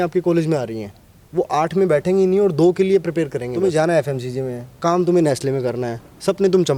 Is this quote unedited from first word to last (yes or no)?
no